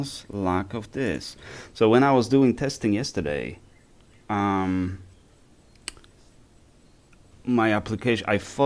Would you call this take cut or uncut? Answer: uncut